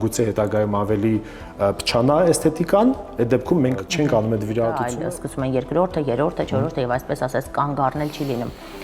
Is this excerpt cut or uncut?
cut